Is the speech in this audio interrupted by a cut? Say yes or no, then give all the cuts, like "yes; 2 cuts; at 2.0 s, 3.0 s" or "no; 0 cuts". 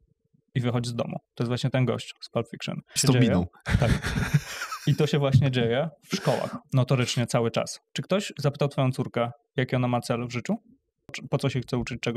yes; 5 cuts; at 1.3 s, 2.9 s, 6.6 s, 7.9 s, 11.1 s